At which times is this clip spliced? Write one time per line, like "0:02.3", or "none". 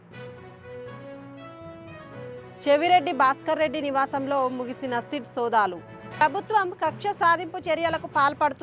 0:01.2